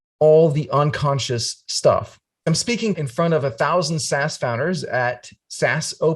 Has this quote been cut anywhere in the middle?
yes; 1 cut; at 2.6 s

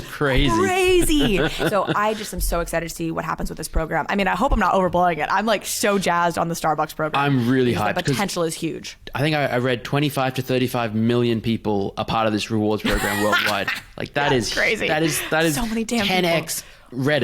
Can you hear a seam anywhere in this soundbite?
yes; 3 cuts; at 1.4 s, 7.1 s, 8.5 s

